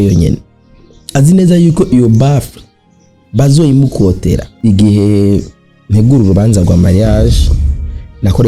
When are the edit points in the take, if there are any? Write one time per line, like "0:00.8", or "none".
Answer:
0:04.5